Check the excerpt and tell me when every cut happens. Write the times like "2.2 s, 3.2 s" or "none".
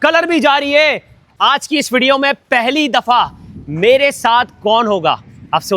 1.2 s